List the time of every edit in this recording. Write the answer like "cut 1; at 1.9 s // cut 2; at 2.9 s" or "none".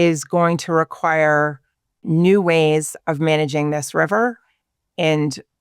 cut 1; at 2.0 s